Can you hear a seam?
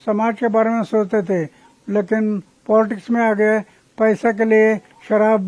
no; 0 cuts

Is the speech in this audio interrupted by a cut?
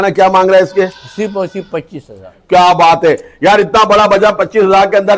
no; 0 cuts

